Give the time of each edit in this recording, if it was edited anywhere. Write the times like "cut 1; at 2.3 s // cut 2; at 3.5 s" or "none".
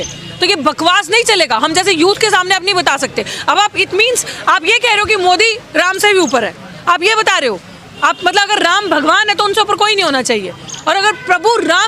none